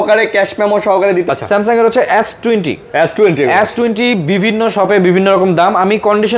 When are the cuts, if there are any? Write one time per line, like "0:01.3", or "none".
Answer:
0:01.3